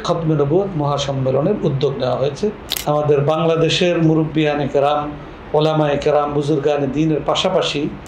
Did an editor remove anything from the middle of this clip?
yes; 1 cut; at 2.7 s

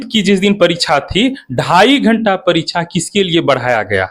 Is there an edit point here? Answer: no; 0 cuts

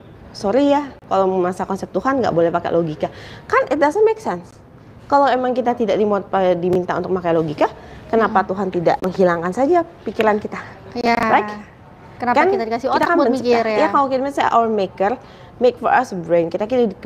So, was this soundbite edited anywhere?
no; 0 cuts

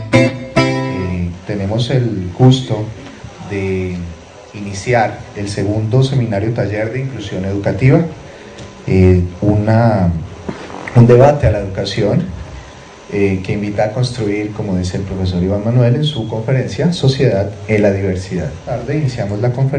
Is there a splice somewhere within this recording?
no; 0 cuts

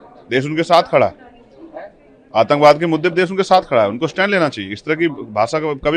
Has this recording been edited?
no; 0 cuts

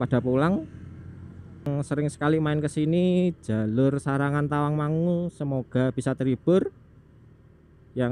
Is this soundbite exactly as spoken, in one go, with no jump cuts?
no; 1 cut; at 1.7 s

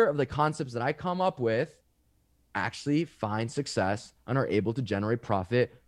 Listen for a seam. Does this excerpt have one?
no; 0 cuts

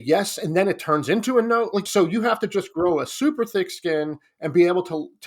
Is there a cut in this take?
yes; 1 cut; at 1.9 s

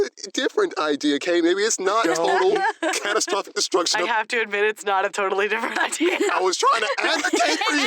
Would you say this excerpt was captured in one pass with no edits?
no; 2 cuts; at 4.1 s, 6.1 s

